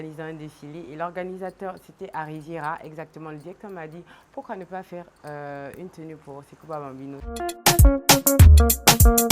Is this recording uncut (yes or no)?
no